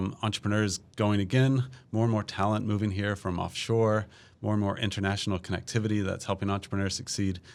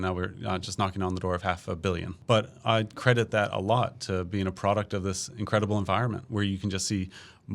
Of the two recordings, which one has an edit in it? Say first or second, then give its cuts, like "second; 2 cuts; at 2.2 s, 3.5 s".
second; 1 cut; at 2.1 s